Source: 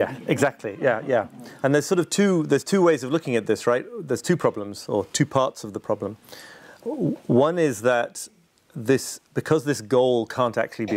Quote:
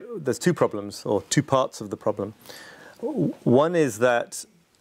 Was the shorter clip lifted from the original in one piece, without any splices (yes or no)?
yes